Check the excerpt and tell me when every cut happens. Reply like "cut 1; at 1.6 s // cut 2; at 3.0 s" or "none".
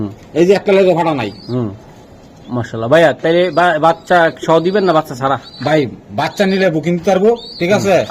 none